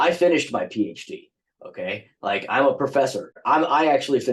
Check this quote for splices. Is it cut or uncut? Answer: cut